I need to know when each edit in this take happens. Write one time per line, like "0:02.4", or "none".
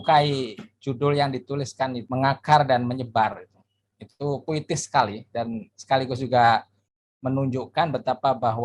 0:02.0